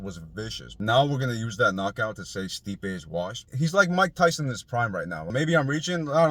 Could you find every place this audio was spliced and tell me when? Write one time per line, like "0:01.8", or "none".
0:03.5
0:05.3